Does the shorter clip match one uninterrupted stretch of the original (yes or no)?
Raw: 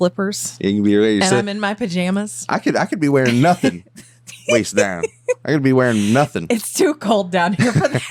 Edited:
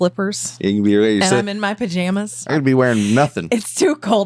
no